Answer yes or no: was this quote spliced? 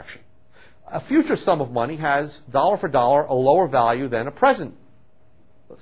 yes